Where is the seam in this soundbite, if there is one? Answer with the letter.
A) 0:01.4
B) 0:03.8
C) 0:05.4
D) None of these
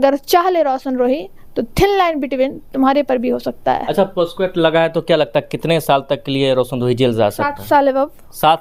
D